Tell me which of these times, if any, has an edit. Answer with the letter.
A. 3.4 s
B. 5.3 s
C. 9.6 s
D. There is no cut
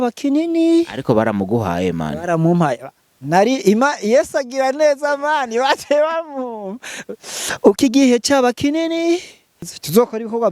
C